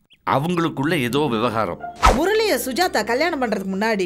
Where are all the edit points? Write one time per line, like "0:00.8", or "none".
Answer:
0:02.0